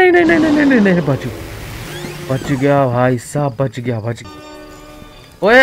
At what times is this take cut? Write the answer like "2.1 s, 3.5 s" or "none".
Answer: 4.2 s